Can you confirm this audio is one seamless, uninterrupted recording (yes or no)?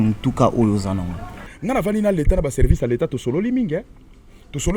no